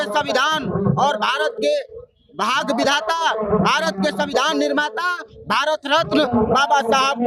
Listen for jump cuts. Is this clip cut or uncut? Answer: uncut